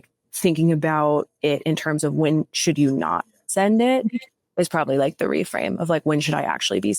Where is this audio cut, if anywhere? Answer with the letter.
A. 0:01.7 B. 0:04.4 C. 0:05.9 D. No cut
D